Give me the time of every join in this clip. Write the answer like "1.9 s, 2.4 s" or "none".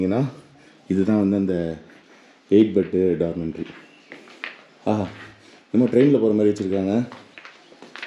none